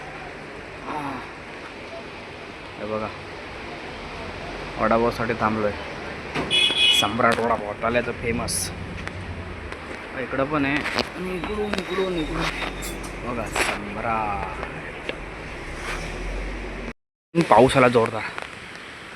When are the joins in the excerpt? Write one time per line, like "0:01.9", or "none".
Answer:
0:17.1